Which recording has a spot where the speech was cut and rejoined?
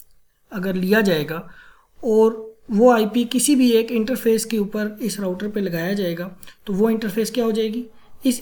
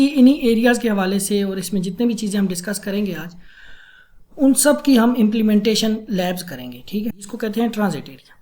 second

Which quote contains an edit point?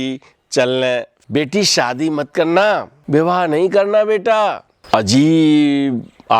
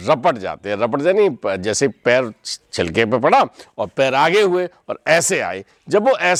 first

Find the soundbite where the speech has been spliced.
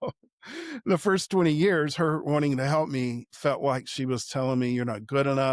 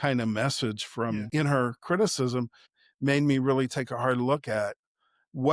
second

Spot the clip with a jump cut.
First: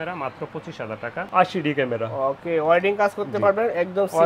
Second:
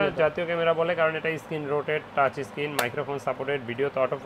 first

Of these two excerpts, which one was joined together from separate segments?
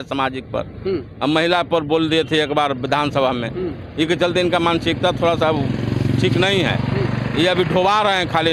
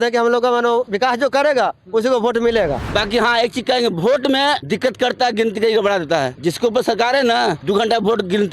second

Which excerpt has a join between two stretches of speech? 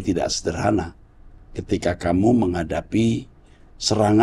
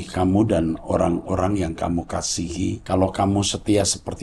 second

